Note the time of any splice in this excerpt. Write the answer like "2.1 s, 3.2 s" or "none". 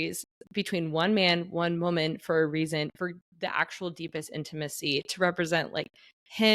none

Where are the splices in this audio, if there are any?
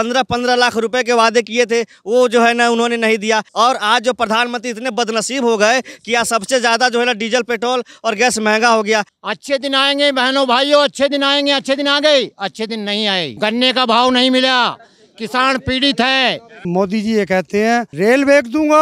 3.5 s, 9.1 s, 13.3 s, 16.6 s, 17.9 s

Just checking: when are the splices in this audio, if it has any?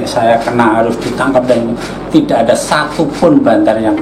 none

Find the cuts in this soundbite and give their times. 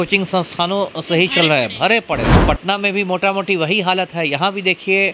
2.3 s

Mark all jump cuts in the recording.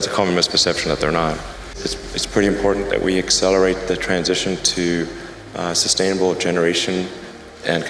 1.7 s

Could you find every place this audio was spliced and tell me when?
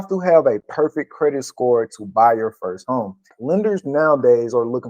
3.4 s

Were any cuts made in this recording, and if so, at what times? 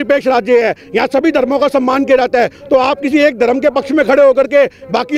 none

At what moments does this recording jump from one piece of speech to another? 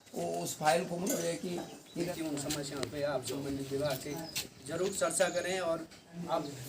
2.1 s

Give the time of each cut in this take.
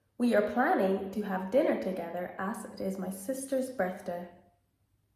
none

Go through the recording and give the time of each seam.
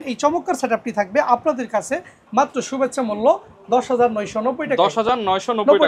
none

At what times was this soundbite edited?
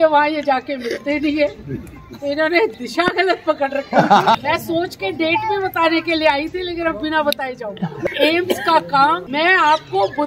4.4 s, 8.0 s, 9.2 s

